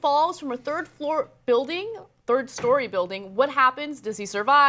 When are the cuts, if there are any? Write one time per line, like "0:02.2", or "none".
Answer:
0:01.3